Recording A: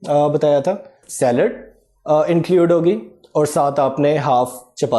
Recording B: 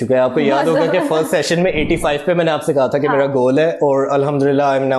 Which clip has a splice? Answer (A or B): A